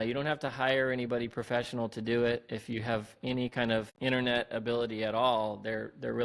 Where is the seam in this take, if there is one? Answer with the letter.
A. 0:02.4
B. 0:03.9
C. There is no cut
B